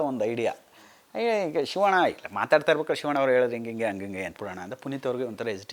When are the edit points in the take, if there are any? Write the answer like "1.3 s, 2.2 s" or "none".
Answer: 4.3 s